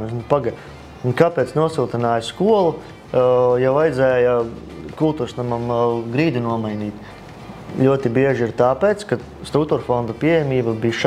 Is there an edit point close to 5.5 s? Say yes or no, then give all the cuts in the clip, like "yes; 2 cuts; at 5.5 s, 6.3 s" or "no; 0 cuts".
no; 0 cuts